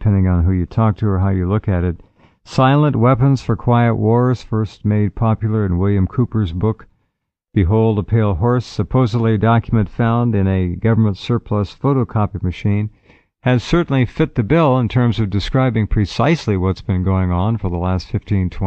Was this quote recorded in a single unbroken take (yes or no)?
yes